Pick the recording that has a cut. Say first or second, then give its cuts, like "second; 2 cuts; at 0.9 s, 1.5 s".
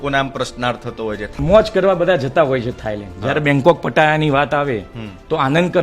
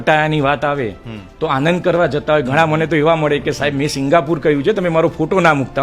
first; 1 cut; at 1.3 s